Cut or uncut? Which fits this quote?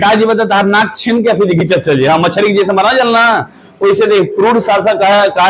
uncut